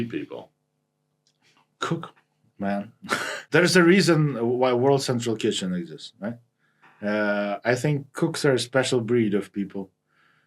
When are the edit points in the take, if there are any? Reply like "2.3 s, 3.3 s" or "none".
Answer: 3.4 s